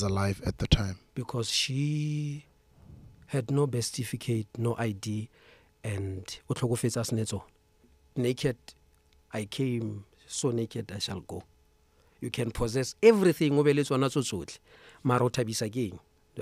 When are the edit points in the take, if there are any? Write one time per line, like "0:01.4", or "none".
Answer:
0:08.0